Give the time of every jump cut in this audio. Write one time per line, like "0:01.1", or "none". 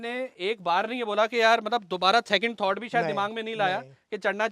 none